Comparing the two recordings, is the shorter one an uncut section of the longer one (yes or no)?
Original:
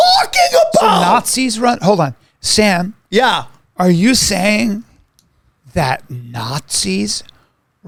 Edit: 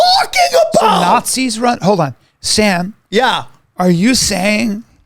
yes